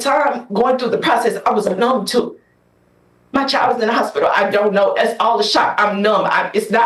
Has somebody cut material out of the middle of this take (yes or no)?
no